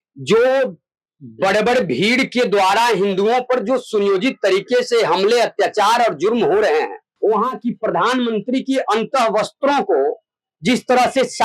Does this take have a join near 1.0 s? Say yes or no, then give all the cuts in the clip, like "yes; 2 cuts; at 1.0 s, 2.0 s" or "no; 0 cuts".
no; 1 cut; at 7.0 s